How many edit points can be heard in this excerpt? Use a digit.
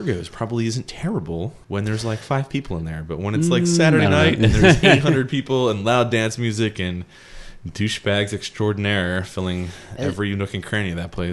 1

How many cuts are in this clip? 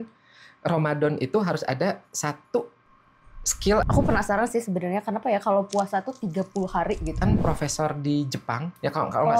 2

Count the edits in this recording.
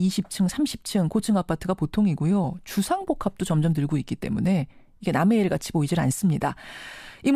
1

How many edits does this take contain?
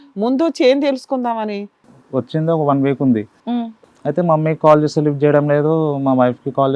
2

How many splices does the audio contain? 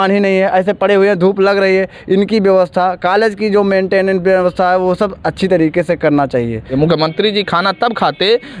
1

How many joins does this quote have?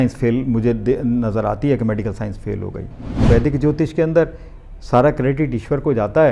1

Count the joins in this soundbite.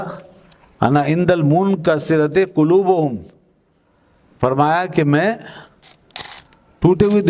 0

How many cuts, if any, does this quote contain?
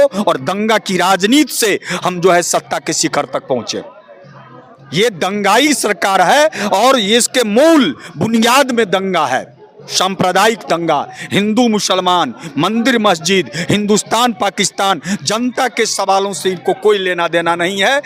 0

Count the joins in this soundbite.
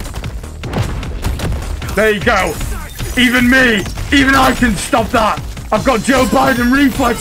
0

